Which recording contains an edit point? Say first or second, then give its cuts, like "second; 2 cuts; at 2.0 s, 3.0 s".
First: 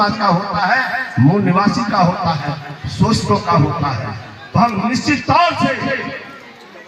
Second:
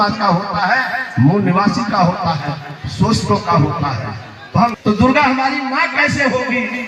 second; 1 cut; at 4.8 s